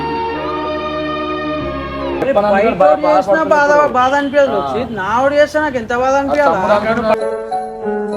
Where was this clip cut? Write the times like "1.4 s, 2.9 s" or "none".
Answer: 2.2 s